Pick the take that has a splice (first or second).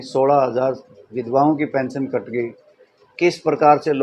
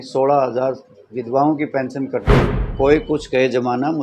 second